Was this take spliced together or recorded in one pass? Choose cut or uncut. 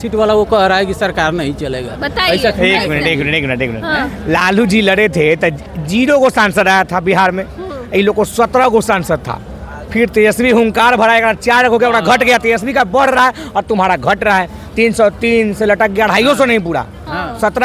uncut